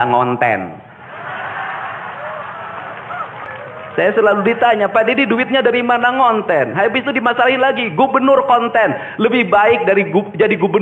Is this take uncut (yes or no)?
no